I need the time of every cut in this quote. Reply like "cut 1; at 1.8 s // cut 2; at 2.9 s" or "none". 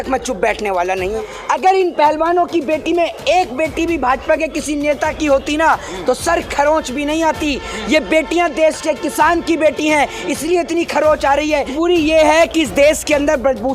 cut 1; at 1.2 s // cut 2; at 11.7 s